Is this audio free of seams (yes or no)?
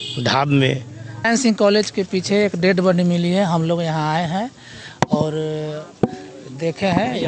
no